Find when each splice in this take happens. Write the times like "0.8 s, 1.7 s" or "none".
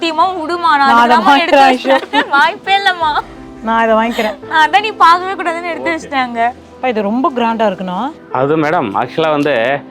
6.7 s